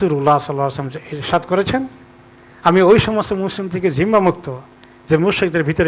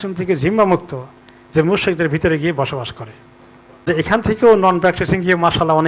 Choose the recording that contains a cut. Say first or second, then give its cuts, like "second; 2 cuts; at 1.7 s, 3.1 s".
second; 1 cut; at 3.9 s